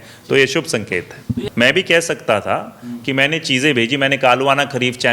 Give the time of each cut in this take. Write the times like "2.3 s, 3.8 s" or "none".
1.4 s